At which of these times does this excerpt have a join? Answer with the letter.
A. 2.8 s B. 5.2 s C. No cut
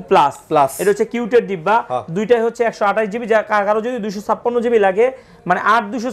C